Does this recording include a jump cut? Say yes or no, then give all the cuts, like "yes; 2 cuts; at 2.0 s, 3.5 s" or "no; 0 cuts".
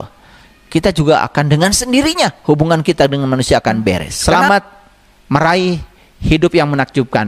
yes; 1 cut; at 4.1 s